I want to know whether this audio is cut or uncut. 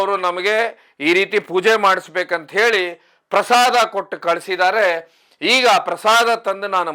uncut